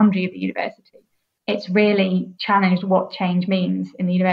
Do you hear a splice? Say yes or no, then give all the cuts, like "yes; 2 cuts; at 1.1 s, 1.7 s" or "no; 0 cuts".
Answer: yes; 2 cuts; at 1.4 s, 2.3 s